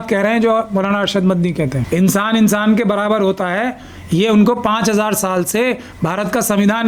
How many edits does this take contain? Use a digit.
1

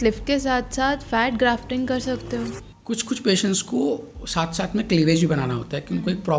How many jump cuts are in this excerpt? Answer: 1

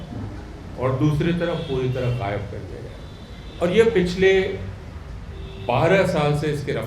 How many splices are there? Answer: 1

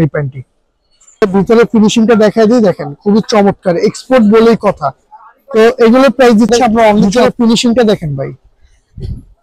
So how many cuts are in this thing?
2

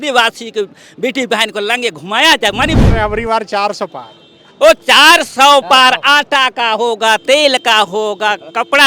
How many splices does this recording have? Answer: 1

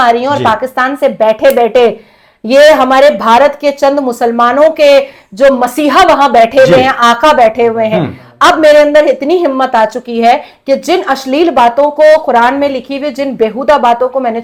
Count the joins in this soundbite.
0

